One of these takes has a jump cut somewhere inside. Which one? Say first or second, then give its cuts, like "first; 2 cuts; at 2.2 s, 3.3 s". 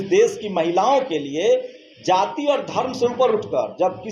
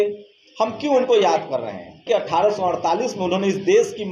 second; 1 cut; at 2.0 s